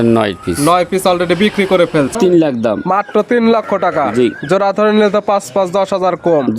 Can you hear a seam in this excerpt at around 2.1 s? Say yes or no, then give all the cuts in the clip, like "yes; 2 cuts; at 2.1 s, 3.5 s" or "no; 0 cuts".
yes; 1 cut; at 2.1 s